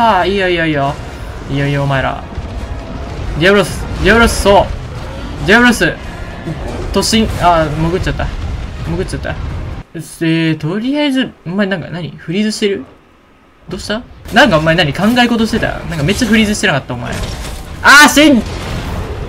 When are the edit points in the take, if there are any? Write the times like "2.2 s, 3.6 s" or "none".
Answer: 9.7 s, 14.2 s